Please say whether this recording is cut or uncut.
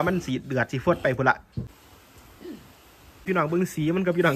cut